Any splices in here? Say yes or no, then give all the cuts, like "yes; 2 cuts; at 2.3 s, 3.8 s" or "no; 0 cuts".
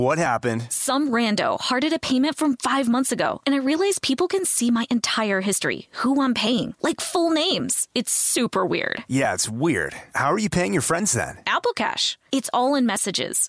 no; 0 cuts